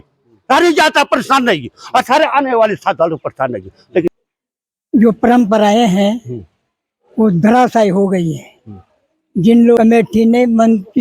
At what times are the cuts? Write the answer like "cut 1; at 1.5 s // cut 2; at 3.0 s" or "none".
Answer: cut 1; at 4.1 s // cut 2; at 9.8 s